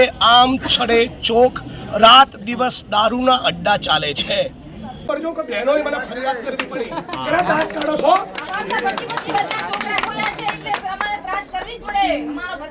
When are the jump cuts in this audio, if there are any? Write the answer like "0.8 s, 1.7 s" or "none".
5.1 s